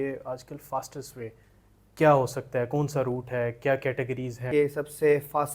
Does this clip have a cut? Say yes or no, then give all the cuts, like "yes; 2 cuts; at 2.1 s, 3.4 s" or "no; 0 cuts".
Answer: yes; 1 cut; at 4.5 s